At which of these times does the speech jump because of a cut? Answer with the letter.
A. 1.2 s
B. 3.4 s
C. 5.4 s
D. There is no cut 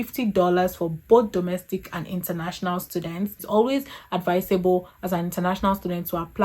B